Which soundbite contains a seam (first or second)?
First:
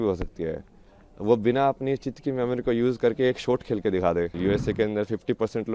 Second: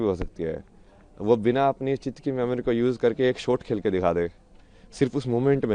first